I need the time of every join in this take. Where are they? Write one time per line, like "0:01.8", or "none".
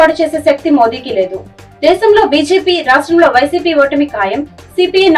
none